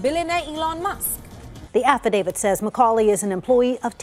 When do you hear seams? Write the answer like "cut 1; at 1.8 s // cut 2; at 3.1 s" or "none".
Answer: none